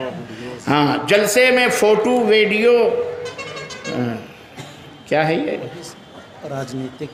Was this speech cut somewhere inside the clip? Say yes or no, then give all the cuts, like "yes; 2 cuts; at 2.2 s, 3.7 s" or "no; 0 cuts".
no; 0 cuts